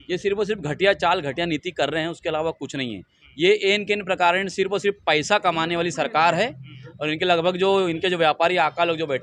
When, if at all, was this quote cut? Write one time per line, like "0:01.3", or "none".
none